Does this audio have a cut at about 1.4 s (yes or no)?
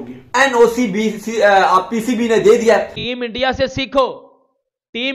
no